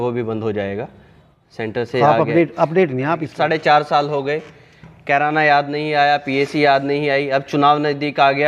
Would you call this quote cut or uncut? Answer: cut